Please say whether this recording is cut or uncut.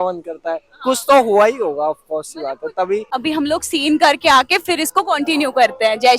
cut